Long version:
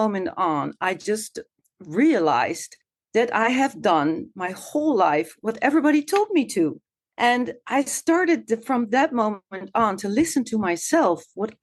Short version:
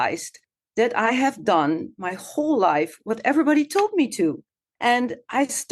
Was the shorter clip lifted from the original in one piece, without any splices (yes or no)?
yes